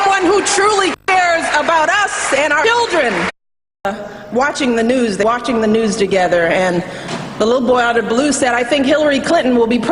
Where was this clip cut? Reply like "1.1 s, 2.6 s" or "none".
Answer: none